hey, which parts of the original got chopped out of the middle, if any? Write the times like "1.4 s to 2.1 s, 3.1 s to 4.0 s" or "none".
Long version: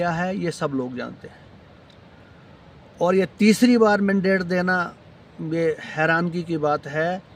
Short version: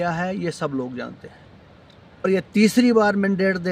2.2 s to 3.1 s